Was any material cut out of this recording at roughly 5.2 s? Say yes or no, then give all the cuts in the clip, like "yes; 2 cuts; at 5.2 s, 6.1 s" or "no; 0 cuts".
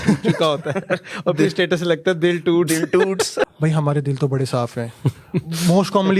no; 1 cut; at 3.5 s